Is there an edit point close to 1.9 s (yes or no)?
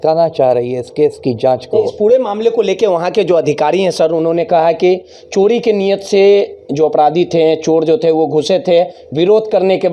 no